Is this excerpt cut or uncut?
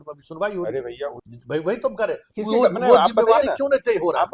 cut